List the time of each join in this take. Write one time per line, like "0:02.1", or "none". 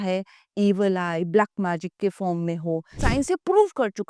0:03.0

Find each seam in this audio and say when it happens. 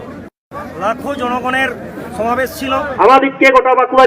0:02.9

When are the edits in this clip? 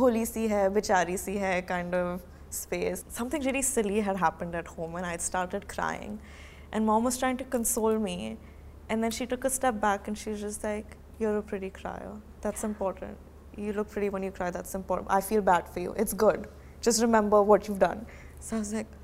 0:03.0

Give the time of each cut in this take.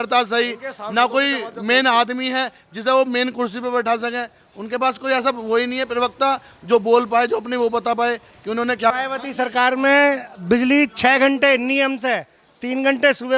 0:08.9

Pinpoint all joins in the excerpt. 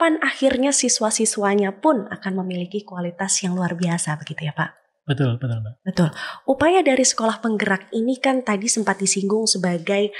none

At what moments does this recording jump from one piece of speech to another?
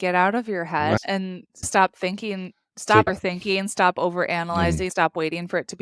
0:01.0
0:03.1

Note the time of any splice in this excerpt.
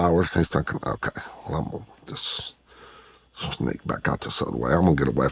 none

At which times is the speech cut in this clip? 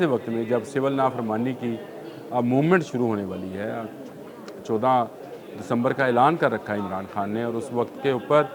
none

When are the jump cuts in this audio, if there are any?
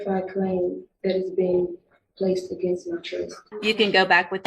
0:03.4

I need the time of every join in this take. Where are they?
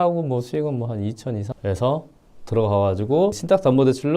0:01.5

